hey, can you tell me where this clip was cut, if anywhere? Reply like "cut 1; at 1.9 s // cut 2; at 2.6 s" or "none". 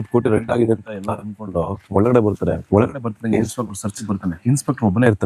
cut 1; at 1.8 s // cut 2; at 2.6 s // cut 3; at 4.4 s